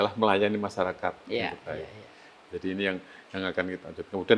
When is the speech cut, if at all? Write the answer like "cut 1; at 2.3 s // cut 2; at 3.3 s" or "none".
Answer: none